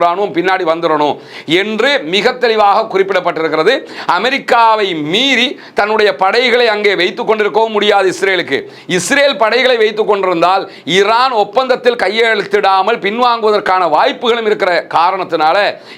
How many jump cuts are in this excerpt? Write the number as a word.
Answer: zero